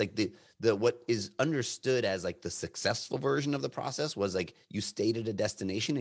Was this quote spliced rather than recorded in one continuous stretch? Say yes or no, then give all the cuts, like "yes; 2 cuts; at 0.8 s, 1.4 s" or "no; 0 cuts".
no; 0 cuts